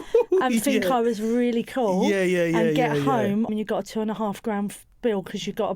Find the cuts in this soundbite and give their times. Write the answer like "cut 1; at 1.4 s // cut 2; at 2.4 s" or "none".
cut 1; at 3.5 s